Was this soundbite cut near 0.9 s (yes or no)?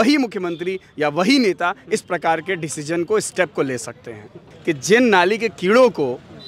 no